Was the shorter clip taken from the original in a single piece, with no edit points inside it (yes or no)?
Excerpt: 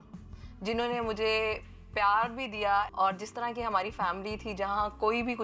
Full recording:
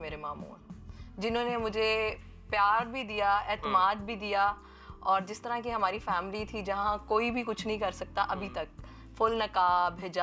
no